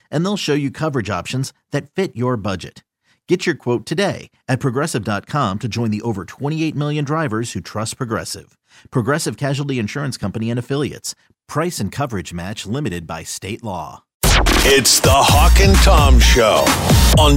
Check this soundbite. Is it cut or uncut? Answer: cut